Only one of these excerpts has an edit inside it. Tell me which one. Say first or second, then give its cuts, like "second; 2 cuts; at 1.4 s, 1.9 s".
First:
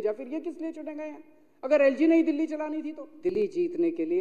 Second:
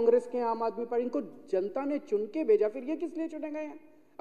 first; 1 cut; at 3.3 s